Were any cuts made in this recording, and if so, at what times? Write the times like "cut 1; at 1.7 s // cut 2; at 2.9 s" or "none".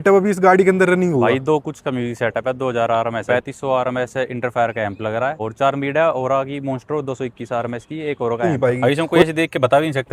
cut 1; at 3.2 s // cut 2; at 5.4 s // cut 3; at 8.5 s